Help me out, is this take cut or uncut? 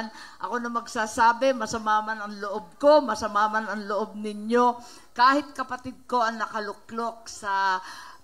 uncut